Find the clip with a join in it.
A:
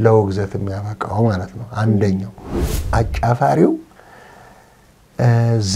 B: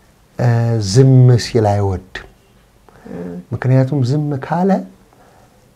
A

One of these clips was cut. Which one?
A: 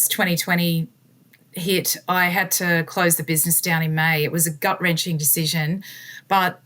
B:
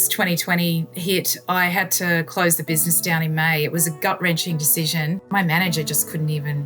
B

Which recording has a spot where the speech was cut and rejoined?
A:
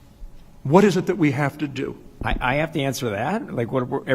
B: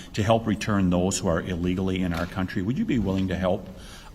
A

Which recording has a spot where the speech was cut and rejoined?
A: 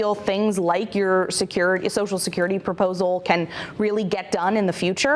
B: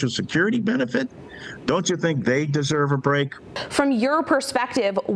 B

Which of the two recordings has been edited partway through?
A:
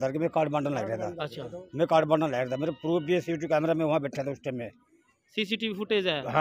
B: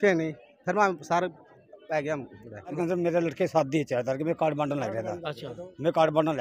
B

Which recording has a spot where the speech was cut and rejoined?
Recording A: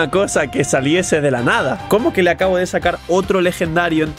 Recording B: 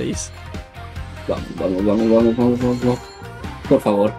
A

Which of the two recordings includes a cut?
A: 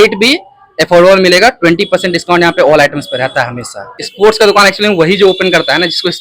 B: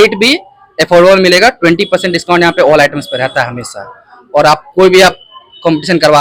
A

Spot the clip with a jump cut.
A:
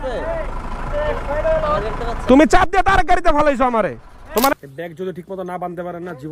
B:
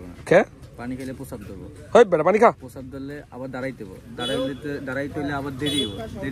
A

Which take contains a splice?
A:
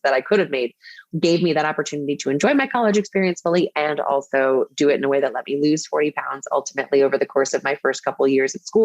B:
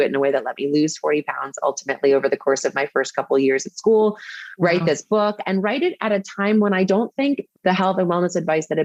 A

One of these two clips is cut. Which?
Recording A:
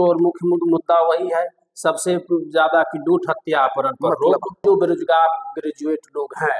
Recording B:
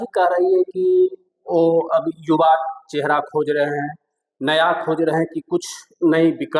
A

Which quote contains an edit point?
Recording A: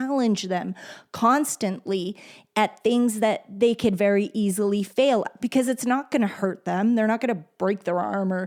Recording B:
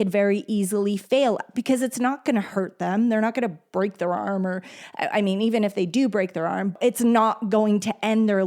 B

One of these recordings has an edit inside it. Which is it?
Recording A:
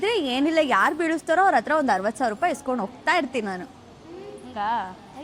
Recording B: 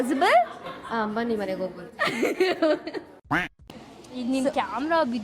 B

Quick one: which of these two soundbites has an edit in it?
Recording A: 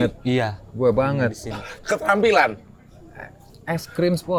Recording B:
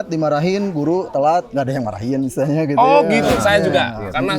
B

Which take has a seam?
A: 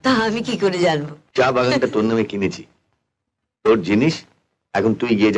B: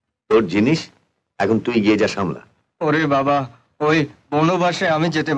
A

